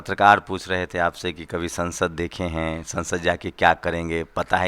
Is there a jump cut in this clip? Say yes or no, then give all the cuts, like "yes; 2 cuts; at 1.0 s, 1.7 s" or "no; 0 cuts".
no; 0 cuts